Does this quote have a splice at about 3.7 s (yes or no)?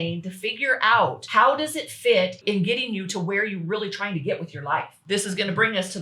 no